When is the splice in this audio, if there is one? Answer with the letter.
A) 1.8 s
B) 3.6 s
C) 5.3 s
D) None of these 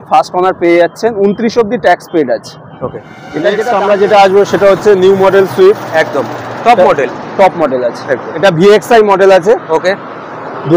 B